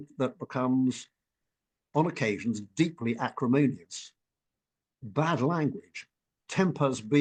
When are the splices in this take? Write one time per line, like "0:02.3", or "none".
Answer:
none